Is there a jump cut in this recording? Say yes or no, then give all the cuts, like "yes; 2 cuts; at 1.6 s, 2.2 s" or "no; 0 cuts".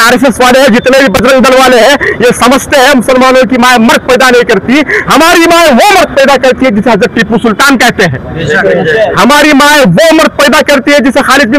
no; 0 cuts